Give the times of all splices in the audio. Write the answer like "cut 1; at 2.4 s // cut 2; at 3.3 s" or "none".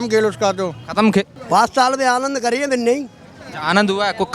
cut 1; at 1.4 s